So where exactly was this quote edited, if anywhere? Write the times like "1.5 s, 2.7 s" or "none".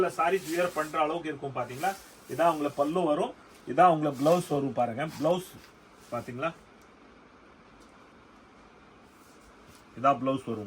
none